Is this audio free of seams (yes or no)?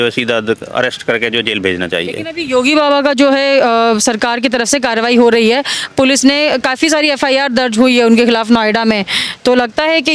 yes